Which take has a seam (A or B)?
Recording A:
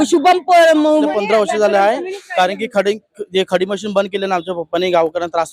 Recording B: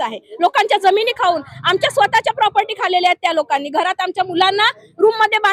A